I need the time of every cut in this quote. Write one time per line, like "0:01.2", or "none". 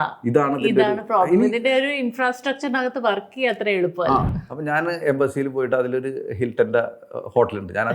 0:04.3